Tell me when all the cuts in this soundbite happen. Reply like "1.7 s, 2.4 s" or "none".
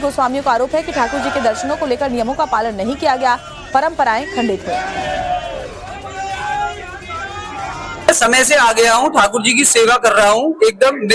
3.8 s

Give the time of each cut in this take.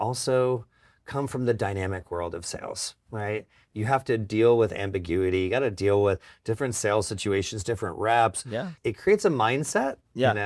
8.7 s

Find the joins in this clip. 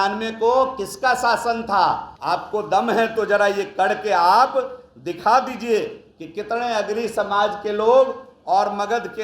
2.1 s

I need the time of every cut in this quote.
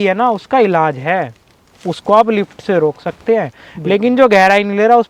none

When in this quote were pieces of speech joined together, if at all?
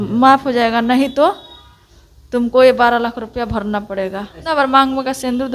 4.4 s

